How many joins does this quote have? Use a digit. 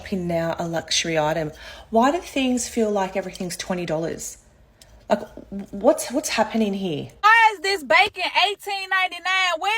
1